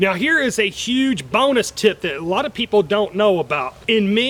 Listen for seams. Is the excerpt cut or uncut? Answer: uncut